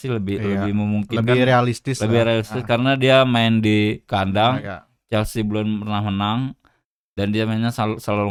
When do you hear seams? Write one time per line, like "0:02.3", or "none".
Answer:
none